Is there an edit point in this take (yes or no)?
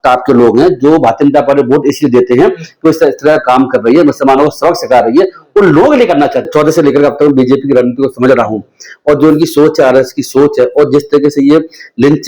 yes